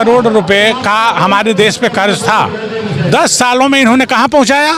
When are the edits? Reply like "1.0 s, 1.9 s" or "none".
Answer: none